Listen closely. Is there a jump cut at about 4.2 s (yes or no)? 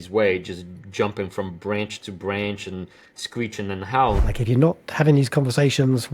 yes